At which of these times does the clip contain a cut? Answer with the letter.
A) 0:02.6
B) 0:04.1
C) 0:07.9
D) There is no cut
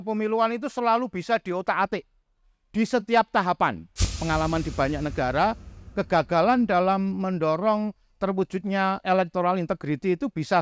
B